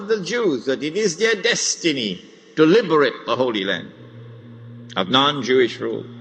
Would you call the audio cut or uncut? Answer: uncut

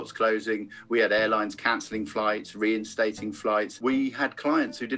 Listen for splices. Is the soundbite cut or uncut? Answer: cut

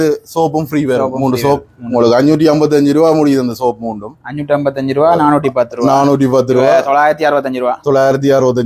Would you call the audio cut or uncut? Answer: uncut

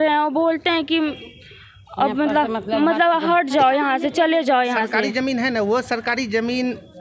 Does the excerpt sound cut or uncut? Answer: uncut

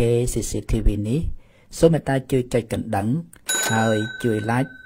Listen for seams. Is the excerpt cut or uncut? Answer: uncut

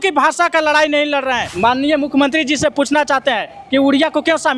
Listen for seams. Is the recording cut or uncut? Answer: cut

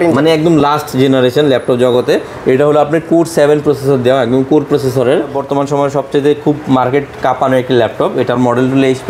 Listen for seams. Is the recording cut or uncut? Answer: cut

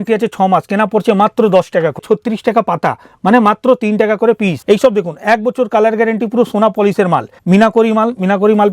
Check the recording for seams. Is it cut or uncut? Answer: cut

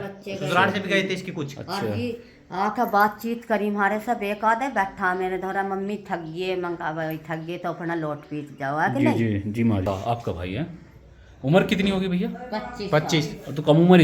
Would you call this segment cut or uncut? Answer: cut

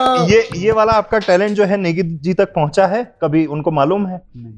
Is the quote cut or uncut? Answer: uncut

